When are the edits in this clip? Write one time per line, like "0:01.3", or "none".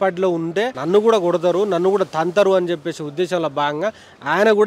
none

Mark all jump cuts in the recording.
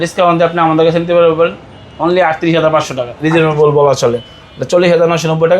0:03.0

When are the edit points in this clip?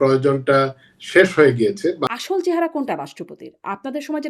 0:02.1

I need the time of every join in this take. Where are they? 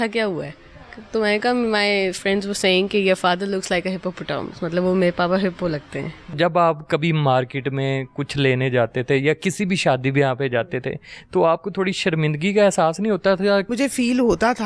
0:06.4
0:13.7

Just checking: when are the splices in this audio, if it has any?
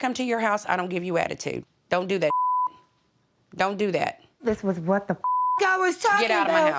0:04.3

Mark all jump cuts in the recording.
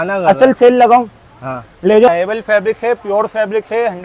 0:02.1

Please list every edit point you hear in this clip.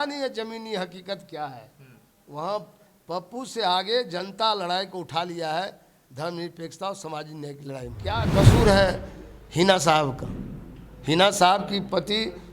0:08.2

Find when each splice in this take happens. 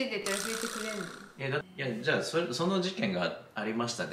0:01.6

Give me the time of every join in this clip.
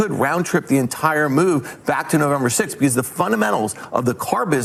none

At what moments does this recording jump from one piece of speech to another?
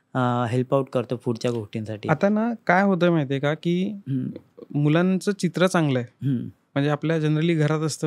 none

